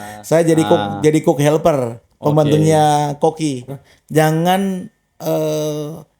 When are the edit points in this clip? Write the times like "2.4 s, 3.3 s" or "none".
3.7 s